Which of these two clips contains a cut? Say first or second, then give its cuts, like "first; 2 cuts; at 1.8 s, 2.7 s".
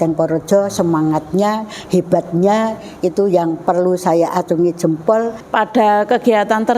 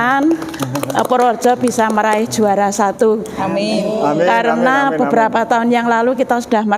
first; 1 cut; at 5.4 s